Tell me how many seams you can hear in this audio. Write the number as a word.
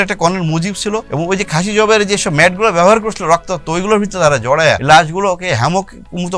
two